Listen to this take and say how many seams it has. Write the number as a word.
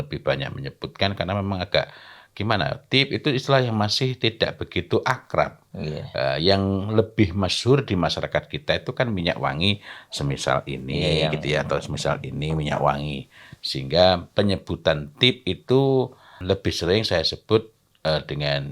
one